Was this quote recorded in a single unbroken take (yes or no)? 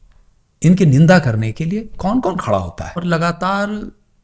no